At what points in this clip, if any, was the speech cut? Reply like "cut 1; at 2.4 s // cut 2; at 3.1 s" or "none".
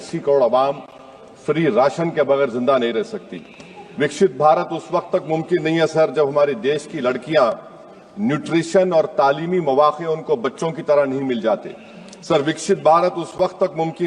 none